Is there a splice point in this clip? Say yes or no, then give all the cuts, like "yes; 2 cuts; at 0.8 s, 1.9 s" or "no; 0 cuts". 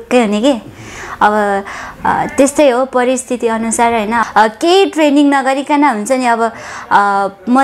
yes; 1 cut; at 4.2 s